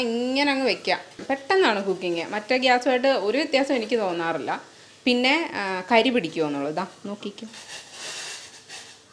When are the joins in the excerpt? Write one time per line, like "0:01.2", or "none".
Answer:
0:01.2